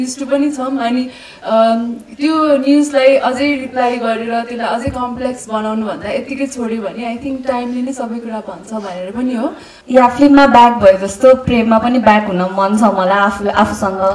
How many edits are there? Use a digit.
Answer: 1